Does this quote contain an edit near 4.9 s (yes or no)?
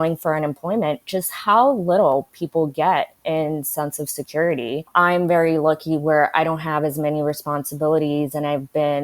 yes